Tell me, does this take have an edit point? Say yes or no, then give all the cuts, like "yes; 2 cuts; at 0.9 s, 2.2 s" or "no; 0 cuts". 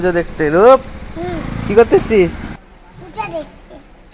yes; 1 cut; at 2.9 s